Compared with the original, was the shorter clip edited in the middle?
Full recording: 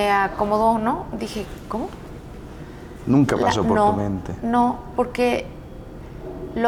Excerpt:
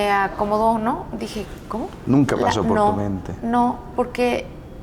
yes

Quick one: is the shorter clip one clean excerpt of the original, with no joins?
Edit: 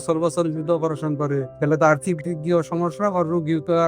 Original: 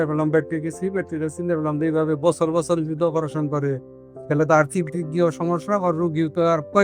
no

